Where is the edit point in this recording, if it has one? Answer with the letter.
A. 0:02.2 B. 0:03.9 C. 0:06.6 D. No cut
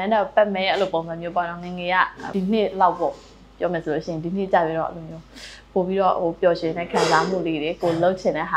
A